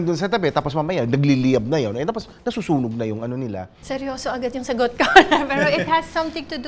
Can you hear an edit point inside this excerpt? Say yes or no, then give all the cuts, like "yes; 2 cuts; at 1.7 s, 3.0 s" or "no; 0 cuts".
yes; 1 cut; at 3.7 s